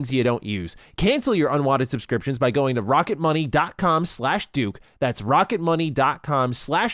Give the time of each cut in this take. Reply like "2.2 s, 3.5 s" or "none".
none